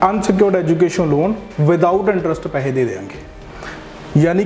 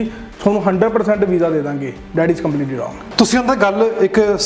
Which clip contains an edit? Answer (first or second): second